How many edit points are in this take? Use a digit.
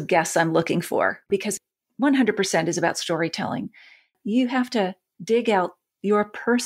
3